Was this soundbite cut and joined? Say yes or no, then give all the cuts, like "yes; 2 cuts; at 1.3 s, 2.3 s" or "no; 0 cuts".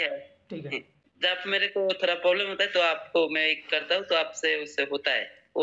yes; 1 cut; at 0.9 s